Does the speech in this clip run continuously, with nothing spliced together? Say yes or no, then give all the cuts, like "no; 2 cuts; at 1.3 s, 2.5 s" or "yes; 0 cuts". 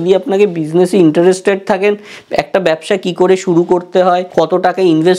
no; 1 cut; at 4.3 s